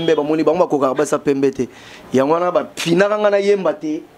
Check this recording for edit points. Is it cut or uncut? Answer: uncut